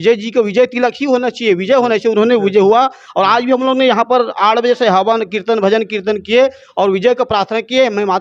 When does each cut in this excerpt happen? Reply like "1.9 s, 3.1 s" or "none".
none